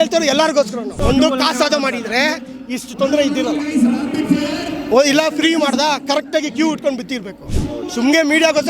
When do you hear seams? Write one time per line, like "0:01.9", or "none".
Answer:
0:01.0